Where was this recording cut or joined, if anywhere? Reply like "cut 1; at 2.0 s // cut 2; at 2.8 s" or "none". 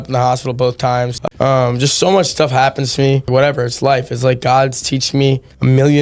cut 1; at 1.3 s // cut 2; at 3.3 s